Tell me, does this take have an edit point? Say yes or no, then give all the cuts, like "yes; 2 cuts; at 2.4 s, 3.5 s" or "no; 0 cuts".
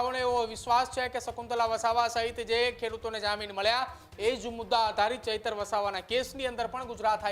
no; 0 cuts